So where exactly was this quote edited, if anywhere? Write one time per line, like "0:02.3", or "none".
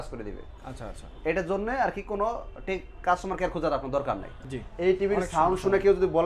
0:04.3